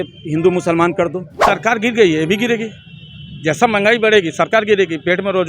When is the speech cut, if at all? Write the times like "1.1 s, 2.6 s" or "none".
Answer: 1.3 s